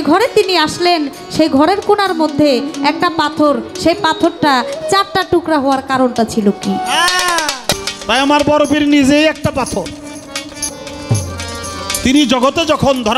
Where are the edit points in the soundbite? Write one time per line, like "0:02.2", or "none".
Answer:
0:07.7
0:10.7